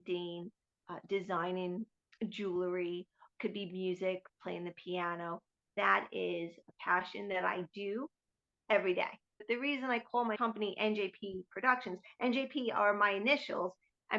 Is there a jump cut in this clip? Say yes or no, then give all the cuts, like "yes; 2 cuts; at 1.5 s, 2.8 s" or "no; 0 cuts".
yes; 1 cut; at 9.4 s